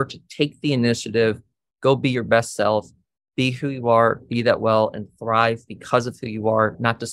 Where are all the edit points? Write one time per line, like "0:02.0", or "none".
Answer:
none